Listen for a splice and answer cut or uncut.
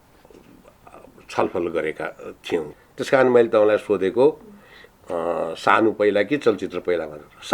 cut